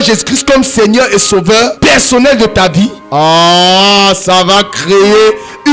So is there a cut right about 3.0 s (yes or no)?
yes